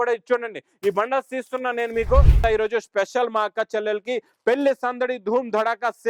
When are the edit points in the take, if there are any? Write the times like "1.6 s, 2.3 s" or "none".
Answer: 2.4 s